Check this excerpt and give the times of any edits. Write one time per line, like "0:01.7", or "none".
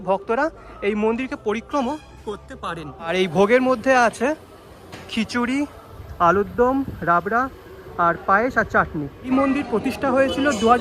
0:03.1
0:09.3